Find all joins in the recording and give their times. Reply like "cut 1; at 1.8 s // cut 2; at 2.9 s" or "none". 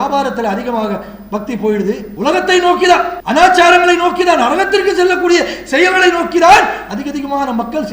cut 1; at 2.1 s // cut 2; at 3.2 s